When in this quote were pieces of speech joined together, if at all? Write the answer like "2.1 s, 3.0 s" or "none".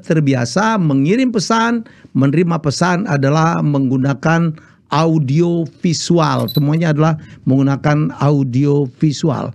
6.5 s